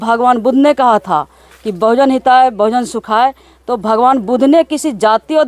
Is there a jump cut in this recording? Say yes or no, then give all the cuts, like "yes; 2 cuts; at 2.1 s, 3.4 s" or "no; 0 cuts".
no; 0 cuts